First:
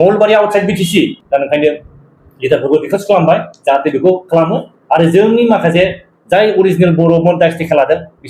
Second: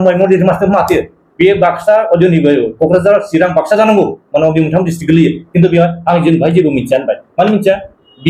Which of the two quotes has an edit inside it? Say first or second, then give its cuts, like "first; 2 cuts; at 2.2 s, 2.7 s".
first; 1 cut; at 1.2 s